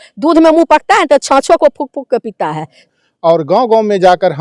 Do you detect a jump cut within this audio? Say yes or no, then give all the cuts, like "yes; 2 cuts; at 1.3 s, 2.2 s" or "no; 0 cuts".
yes; 1 cut; at 2.9 s